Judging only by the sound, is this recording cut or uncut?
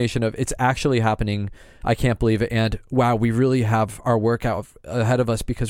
uncut